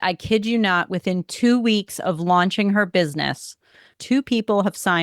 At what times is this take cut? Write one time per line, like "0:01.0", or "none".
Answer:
0:03.9